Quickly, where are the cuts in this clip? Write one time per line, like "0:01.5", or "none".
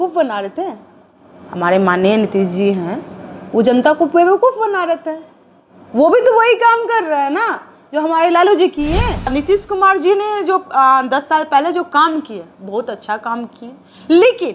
0:09.3